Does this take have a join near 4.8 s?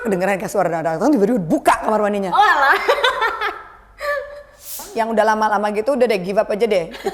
yes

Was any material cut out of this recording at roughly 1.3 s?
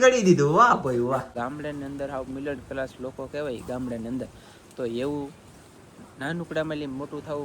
yes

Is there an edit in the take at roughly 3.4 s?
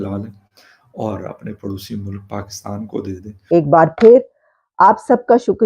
yes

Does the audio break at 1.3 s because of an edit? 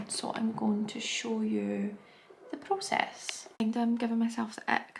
no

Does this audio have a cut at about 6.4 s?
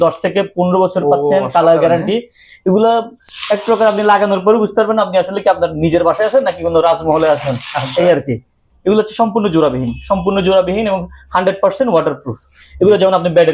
no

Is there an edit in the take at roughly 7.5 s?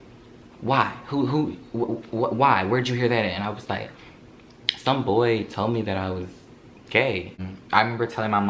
yes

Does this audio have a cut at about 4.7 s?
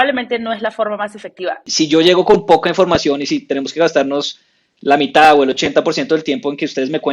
no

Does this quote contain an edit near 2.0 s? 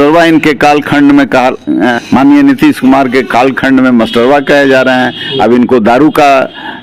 yes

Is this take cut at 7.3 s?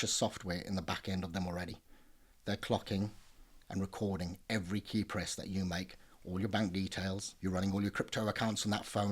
yes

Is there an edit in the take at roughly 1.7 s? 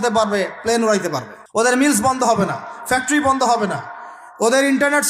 yes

